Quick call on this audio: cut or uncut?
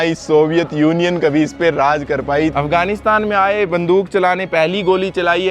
cut